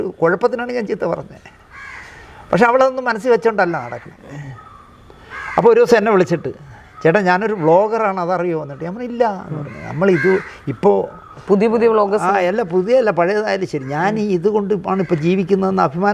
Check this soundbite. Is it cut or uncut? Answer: uncut